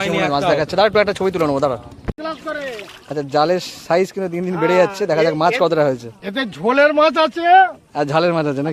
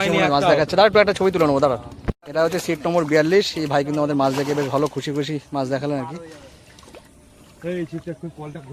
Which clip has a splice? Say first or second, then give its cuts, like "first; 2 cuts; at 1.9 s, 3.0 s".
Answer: first; 1 cut; at 2.2 s